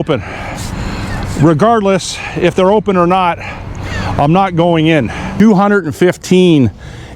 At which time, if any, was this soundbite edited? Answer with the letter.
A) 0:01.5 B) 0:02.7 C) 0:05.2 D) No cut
C